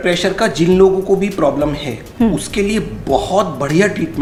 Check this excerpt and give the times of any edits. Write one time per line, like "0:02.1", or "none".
none